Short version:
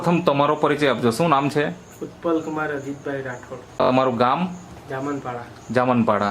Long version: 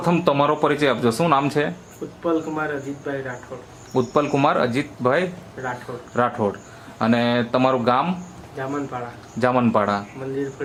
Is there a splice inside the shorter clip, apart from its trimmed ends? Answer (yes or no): yes